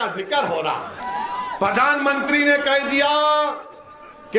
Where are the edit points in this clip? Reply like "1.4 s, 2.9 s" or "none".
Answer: 1.0 s